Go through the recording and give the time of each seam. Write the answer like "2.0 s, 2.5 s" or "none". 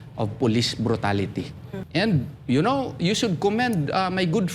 1.8 s